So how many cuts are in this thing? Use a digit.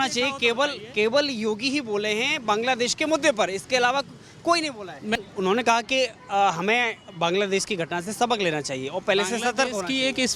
1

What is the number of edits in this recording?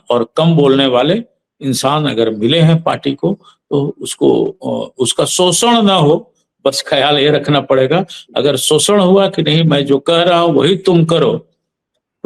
0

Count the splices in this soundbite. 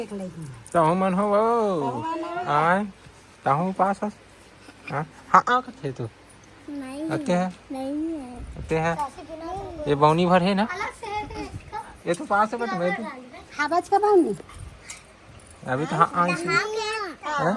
0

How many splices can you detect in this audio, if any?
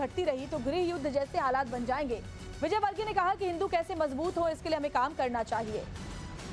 1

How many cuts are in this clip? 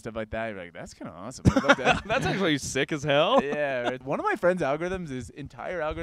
1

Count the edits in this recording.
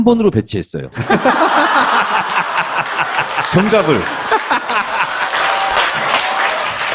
1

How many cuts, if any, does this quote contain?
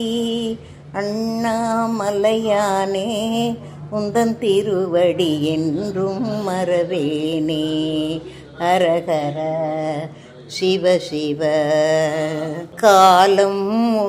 1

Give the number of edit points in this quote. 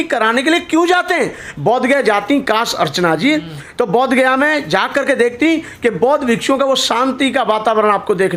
0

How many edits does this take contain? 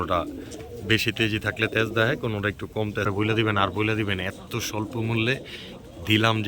1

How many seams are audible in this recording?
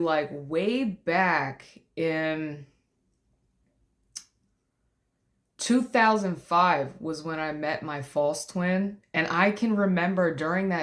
0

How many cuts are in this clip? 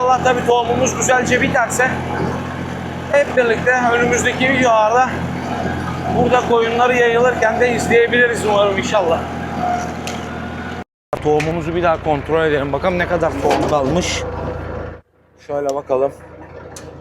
0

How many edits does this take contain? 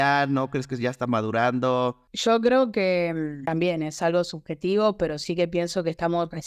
2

